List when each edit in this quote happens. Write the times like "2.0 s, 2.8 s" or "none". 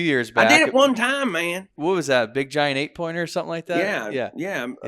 1.7 s